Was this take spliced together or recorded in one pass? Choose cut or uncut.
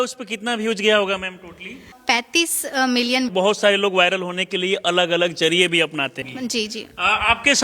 cut